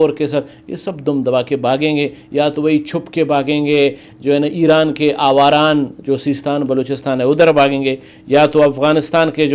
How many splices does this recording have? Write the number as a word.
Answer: zero